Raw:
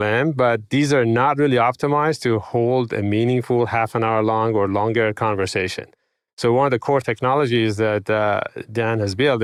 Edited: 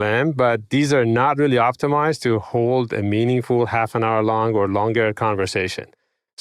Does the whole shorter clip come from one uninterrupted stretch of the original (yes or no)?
yes